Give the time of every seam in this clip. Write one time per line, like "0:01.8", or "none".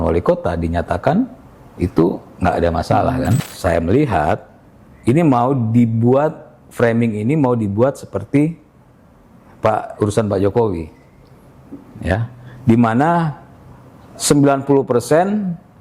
0:03.5